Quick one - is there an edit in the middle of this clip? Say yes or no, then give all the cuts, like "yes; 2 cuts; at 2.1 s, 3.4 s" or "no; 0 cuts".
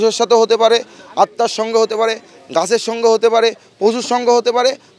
no; 0 cuts